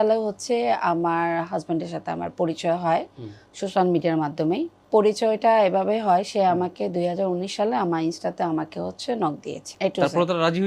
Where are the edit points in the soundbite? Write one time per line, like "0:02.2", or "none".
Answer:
0:04.8
0:09.7